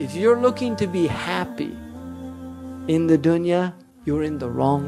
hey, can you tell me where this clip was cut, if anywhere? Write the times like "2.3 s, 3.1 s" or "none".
3.9 s